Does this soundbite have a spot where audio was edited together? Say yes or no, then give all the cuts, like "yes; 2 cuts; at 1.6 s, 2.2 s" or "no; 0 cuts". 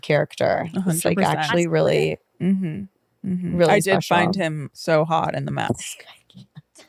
no; 0 cuts